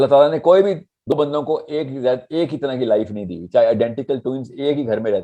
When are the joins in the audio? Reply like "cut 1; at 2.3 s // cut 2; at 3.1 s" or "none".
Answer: cut 1; at 1.1 s

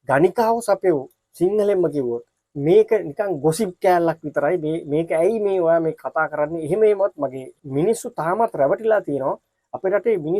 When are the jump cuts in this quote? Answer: cut 1; at 2.3 s // cut 2; at 7.5 s

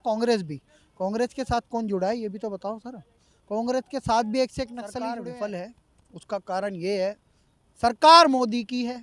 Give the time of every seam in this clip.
cut 1; at 5.0 s

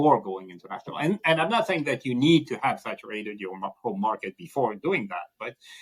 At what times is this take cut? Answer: none

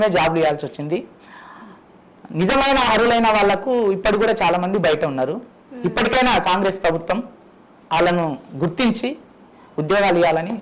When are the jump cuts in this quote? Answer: none

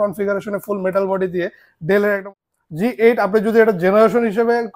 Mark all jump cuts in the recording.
cut 1; at 2.2 s

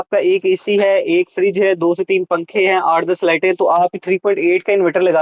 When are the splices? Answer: none

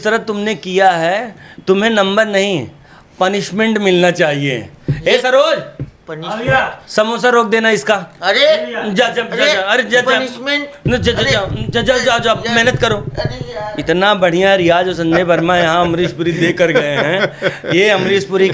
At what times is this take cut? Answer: none

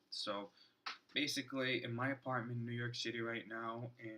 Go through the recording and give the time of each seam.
cut 1; at 1.8 s

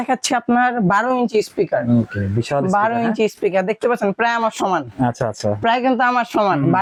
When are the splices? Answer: none

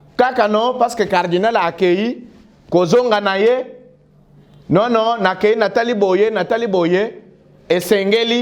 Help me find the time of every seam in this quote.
none

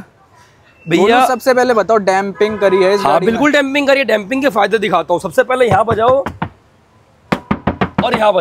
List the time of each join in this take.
none

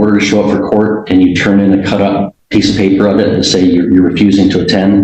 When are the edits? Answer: cut 1; at 2.4 s

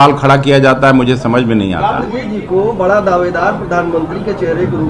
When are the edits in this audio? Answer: cut 1; at 2.2 s

